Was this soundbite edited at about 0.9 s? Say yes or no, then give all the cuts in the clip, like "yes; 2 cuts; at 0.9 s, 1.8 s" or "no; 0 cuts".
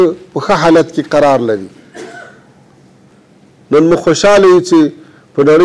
no; 1 cut; at 3.1 s